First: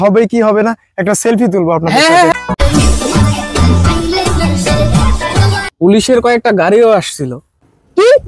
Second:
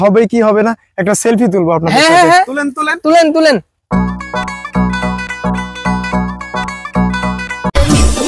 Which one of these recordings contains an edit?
first; 2 cuts; at 2.3 s, 5.6 s

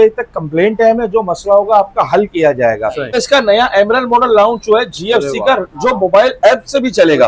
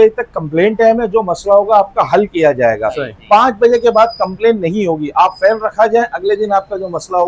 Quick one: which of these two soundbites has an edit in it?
first; 1 cut; at 3.2 s

